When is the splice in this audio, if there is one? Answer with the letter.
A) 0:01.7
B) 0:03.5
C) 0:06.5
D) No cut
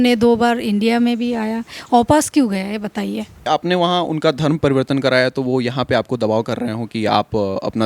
B